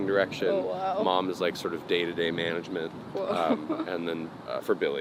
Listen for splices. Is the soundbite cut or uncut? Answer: uncut